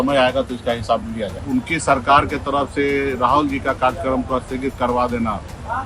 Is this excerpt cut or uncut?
cut